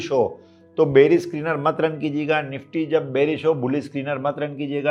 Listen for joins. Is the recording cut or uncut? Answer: uncut